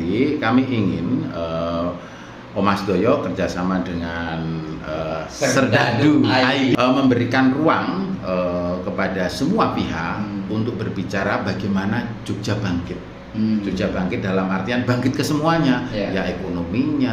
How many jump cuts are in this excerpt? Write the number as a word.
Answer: one